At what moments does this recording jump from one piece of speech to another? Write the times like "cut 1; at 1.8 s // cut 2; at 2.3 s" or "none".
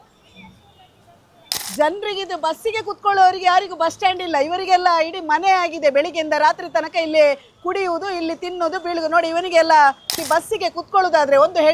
cut 1; at 1.5 s // cut 2; at 10.1 s